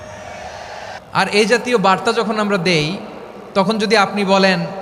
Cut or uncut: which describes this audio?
cut